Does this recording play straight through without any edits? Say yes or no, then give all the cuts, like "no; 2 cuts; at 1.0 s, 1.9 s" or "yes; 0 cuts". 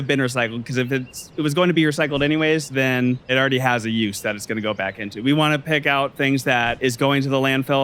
no; 2 cuts; at 3.3 s, 6.8 s